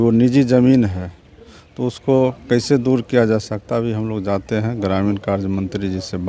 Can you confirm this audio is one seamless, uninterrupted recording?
yes; 0 cuts

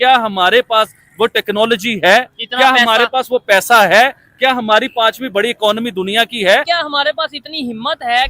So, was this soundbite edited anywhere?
yes; 1 cut; at 6.6 s

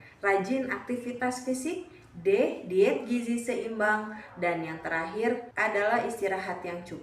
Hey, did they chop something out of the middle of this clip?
yes; 1 cut; at 5.5 s

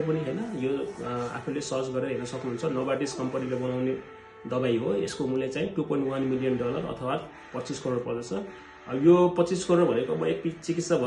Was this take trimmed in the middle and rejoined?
no; 0 cuts

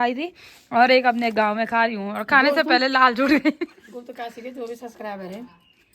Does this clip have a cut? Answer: no; 0 cuts

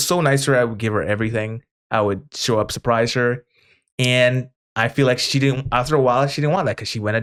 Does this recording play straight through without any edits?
yes; 0 cuts

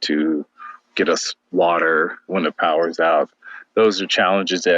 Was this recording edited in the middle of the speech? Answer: yes; 3 cuts; at 1.4 s, 2.3 s, 3.3 s

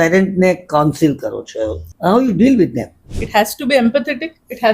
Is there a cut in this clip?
yes; 2 cuts; at 1.8 s, 3.1 s

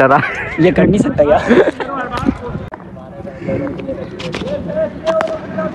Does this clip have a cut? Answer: yes; 1 cut; at 2.7 s

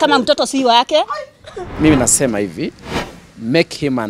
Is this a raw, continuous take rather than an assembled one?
no; 1 cut; at 1.7 s

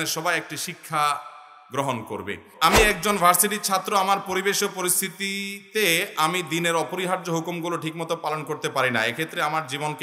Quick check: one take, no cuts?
no; 1 cut; at 2.5 s

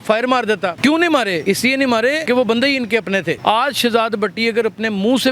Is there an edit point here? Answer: yes; 3 cuts; at 0.8 s, 1.7 s, 3.4 s

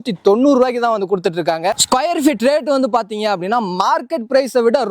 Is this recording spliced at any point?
no; 0 cuts

